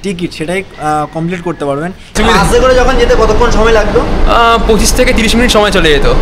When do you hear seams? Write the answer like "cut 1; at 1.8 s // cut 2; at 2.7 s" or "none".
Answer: cut 1; at 2.2 s